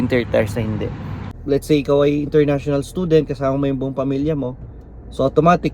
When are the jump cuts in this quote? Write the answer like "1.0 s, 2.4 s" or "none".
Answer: 1.2 s